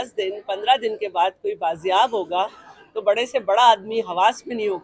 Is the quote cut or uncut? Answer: uncut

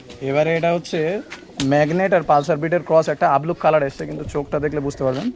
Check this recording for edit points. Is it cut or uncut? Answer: uncut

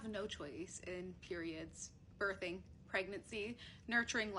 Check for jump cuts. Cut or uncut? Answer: uncut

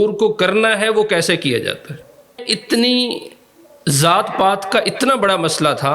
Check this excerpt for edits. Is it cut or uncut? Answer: cut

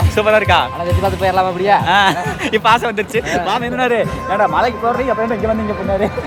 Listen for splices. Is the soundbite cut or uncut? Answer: uncut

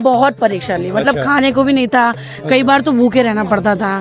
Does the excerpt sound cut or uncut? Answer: uncut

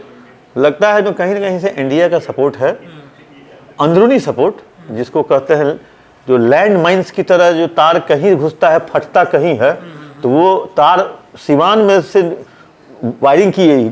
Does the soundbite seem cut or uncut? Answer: uncut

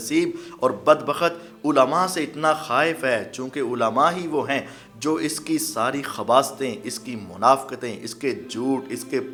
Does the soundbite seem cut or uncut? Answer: uncut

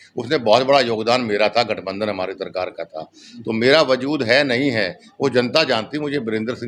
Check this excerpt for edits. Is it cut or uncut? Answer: uncut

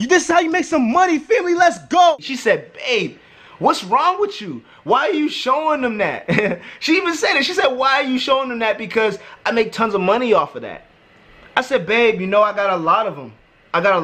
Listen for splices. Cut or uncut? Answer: cut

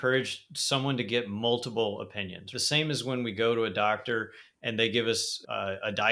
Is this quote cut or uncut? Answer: cut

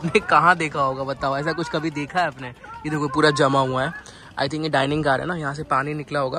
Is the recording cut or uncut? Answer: uncut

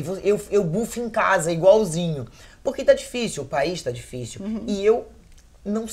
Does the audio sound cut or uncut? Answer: uncut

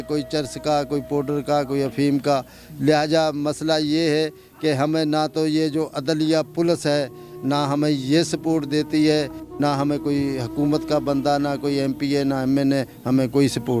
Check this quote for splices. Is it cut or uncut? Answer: uncut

